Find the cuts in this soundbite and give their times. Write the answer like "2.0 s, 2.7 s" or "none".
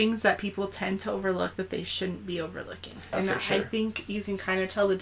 3.1 s